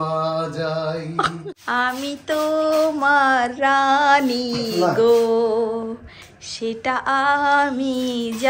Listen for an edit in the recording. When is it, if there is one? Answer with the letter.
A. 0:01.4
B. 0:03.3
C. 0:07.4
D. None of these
A